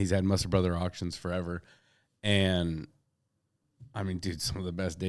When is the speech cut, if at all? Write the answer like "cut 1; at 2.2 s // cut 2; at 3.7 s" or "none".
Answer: none